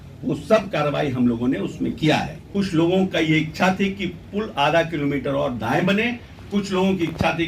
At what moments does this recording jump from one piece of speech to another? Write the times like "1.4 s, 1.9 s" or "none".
2.5 s